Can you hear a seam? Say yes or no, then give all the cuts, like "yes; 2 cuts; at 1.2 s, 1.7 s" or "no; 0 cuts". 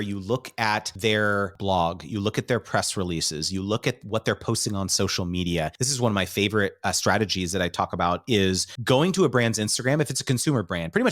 yes; 3 cuts; at 1.3 s, 5.8 s, 8.7 s